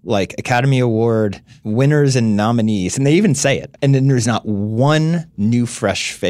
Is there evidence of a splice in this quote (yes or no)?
yes